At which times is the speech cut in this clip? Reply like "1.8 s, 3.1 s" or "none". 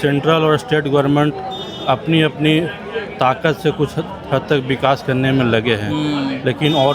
none